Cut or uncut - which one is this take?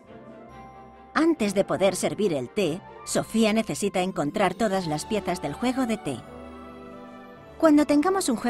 cut